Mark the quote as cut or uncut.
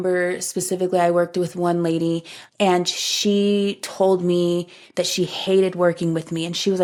uncut